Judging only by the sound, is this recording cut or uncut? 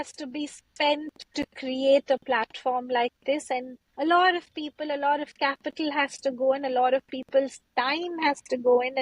cut